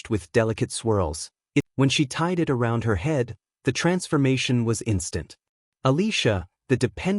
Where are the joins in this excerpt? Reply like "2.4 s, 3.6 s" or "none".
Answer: 1.7 s